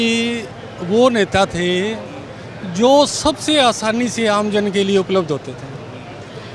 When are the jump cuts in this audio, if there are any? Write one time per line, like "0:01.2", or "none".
none